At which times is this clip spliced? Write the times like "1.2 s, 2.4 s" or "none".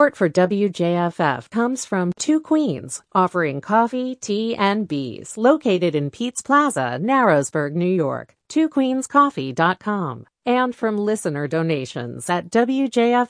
none

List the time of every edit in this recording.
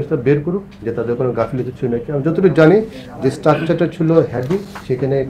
none

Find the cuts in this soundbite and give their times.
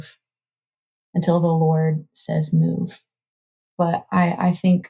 3.4 s

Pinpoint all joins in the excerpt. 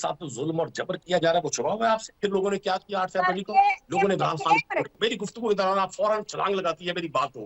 1.0 s, 2.1 s, 4.9 s

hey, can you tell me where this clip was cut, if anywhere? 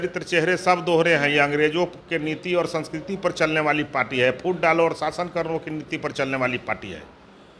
none

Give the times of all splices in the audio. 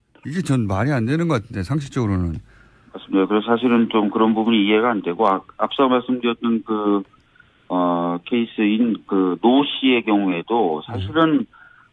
none

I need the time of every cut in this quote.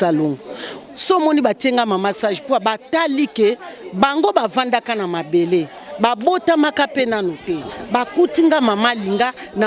none

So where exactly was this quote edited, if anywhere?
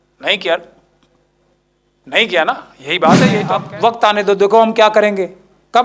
3.4 s

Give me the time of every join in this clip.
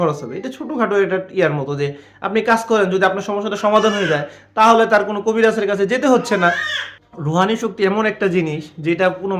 7.1 s

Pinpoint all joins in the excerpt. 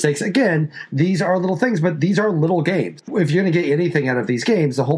3.1 s

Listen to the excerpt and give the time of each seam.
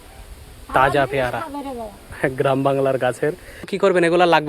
2.1 s, 3.7 s

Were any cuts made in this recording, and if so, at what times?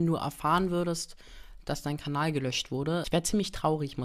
none

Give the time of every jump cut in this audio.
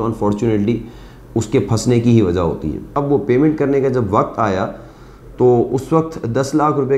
2.9 s

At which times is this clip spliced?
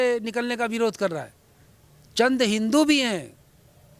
none

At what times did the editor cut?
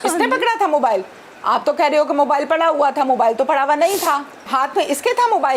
4.4 s

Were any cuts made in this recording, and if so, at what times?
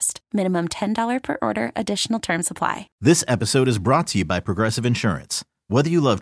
2.8 s

